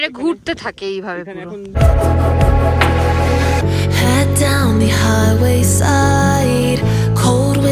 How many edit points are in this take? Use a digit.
1